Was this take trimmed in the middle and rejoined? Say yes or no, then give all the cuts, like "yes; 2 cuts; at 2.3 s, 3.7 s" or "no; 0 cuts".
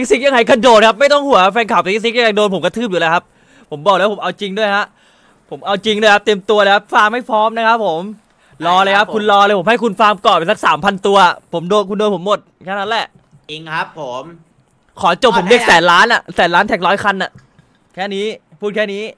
no; 0 cuts